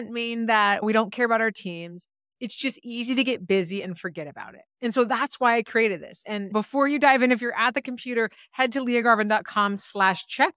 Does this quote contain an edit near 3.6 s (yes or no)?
no